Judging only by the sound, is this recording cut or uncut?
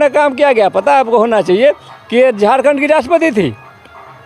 uncut